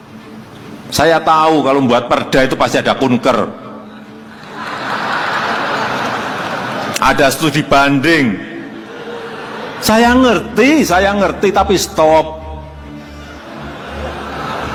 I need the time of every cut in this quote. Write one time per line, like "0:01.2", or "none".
none